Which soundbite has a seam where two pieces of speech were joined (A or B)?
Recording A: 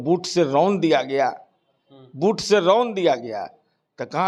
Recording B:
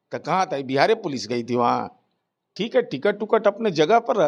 B